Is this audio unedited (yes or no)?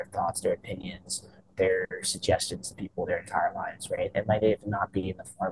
yes